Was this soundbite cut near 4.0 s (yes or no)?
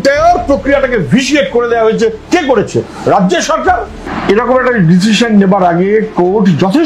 yes